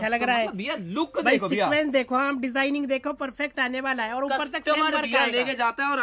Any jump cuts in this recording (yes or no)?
no